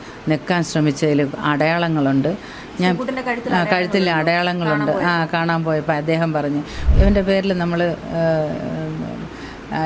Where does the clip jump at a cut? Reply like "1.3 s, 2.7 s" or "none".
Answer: 6.9 s